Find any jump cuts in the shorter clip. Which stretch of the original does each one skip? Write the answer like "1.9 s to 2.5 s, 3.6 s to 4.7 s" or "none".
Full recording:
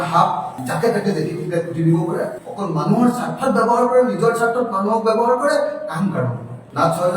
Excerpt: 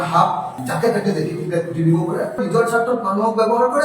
2.4 s to 4.1 s